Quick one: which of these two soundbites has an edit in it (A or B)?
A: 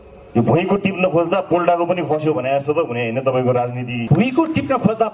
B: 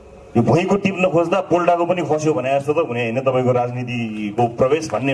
A